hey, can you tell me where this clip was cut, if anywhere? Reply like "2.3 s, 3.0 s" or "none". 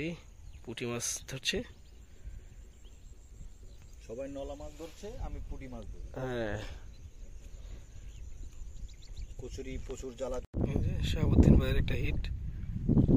none